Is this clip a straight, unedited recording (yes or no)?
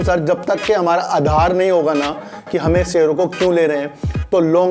yes